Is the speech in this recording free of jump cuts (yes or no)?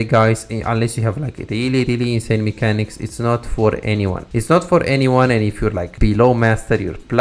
no